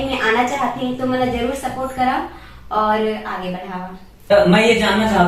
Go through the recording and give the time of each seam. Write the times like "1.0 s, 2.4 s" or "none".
4.3 s